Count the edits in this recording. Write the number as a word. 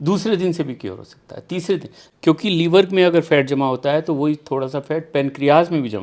one